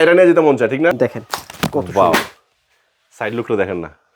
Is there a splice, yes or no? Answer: yes